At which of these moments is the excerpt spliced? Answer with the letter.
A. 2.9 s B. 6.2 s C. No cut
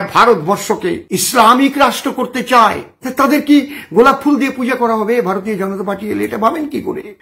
A